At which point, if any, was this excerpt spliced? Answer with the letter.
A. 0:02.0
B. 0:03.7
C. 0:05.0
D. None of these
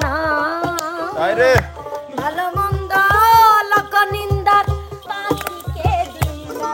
C